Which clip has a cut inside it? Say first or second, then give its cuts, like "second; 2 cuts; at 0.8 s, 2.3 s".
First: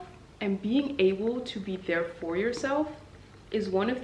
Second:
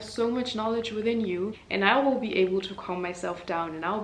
second; 1 cut; at 1.5 s